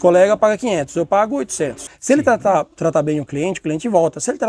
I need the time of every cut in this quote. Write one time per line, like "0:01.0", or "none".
0:01.9